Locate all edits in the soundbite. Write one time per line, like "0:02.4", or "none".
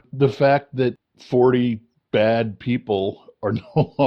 0:01.1
0:01.9